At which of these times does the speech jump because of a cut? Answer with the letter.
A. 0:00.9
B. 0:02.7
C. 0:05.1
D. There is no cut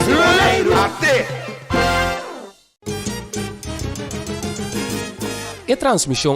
B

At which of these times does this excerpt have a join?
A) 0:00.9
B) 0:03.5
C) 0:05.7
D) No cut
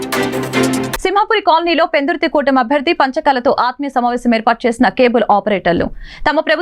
A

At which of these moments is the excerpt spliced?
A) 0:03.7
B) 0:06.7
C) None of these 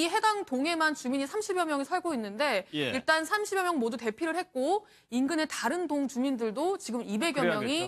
A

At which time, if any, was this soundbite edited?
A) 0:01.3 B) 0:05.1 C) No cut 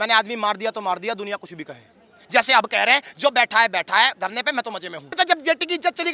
B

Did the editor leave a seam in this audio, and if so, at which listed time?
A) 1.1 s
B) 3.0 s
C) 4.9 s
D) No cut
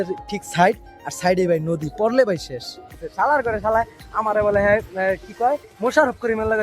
B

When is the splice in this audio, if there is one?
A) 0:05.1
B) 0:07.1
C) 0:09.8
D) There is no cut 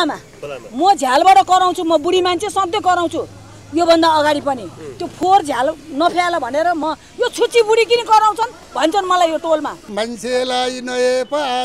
C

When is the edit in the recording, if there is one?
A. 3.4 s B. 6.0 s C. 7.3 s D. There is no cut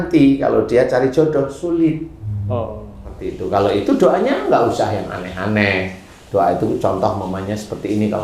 A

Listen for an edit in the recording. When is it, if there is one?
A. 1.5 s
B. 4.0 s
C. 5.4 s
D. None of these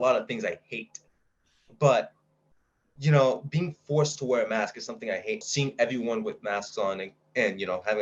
C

